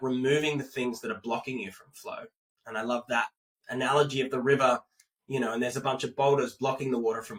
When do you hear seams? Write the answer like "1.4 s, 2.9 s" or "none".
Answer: none